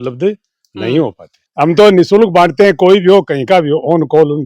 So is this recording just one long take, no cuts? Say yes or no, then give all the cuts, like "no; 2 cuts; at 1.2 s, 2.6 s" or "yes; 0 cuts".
no; 1 cut; at 1.4 s